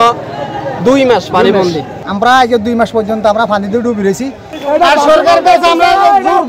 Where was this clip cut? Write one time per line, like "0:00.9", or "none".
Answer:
0:01.9
0:04.5